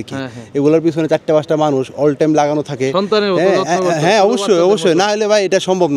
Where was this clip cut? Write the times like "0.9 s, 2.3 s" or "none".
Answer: none